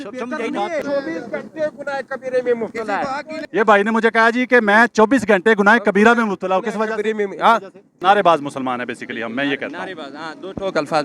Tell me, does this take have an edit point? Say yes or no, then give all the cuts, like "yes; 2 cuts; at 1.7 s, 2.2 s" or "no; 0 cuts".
yes; 3 cuts; at 0.8 s, 3.3 s, 8.0 s